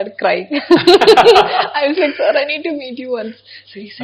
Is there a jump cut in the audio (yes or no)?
no